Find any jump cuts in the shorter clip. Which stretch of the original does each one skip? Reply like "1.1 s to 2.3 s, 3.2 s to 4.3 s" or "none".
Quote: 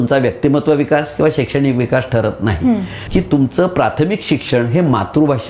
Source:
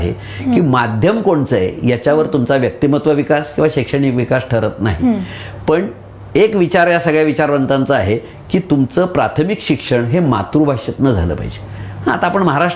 5.4 s to 8.4 s

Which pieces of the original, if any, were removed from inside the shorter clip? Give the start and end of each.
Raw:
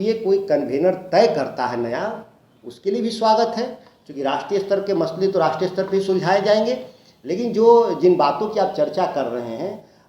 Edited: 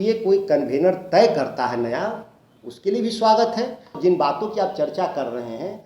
3.9 s to 7.9 s

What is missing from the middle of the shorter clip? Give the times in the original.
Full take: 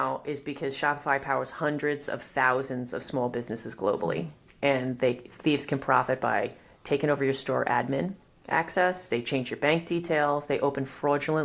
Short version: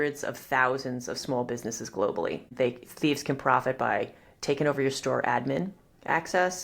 4.4 s to 4.9 s

